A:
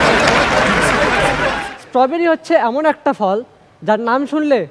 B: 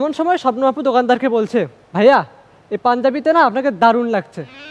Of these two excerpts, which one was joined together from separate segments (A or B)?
A